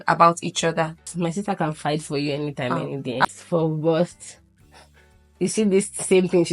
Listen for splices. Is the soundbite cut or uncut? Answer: cut